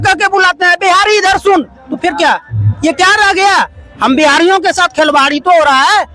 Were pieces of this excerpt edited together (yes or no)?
no